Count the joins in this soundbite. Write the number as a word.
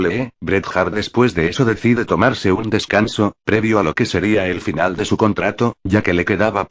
one